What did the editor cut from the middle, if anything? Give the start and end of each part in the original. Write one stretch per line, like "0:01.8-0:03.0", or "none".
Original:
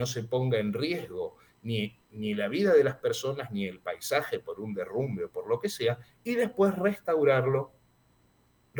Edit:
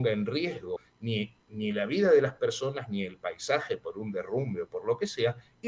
0:01.4-0:01.5